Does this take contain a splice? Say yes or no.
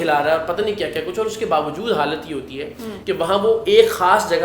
yes